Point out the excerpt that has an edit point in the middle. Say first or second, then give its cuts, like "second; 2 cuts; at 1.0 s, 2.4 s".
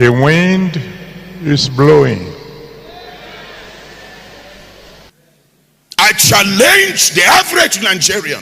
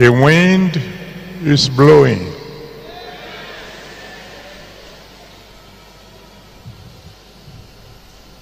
first; 1 cut; at 5.1 s